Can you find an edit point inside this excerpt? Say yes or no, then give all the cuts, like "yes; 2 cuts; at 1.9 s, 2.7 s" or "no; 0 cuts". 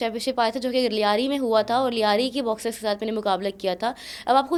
no; 0 cuts